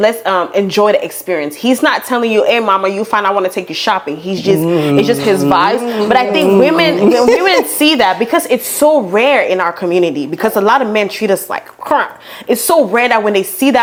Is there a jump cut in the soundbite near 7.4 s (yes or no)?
no